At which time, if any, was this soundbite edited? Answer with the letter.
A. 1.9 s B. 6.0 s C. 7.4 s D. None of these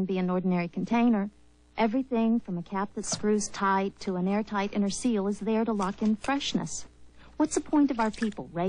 D